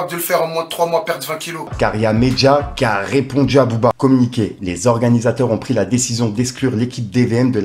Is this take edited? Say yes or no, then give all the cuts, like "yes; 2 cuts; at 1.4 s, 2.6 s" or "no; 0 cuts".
yes; 2 cuts; at 1.7 s, 4.5 s